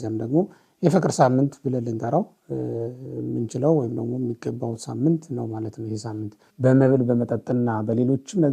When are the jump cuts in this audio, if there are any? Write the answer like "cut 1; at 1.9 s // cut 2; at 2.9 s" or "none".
cut 1; at 6.4 s